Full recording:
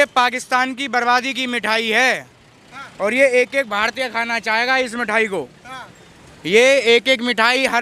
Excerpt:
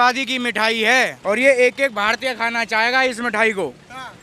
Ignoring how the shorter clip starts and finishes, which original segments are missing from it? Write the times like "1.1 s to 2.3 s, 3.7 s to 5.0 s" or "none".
2.2 s to 2.9 s